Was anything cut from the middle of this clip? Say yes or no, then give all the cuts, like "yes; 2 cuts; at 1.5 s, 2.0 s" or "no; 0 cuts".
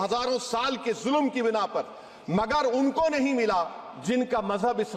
no; 0 cuts